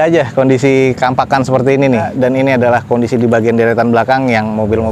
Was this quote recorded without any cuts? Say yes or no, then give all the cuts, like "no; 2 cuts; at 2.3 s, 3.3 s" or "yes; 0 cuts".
no; 1 cut; at 2.1 s